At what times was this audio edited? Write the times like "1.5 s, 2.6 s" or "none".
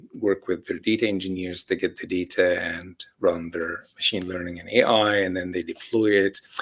none